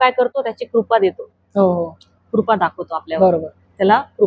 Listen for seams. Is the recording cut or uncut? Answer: uncut